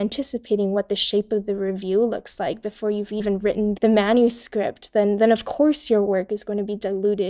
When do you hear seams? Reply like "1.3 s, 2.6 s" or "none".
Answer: 3.6 s